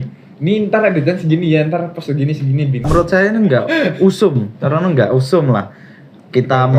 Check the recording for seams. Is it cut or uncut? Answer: cut